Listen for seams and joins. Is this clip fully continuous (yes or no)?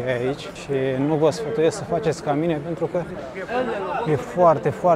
yes